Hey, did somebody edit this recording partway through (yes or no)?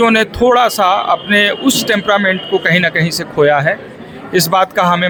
no